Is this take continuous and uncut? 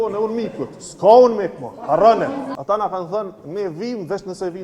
no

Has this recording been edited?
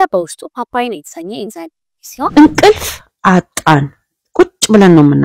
yes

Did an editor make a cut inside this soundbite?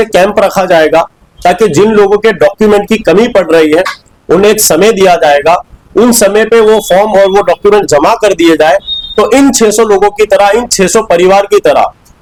no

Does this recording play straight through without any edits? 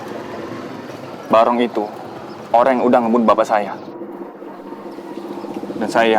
no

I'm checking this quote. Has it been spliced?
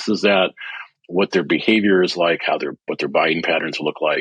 no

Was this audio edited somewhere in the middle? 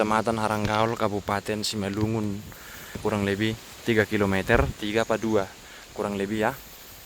yes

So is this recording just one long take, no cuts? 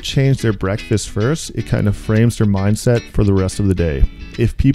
yes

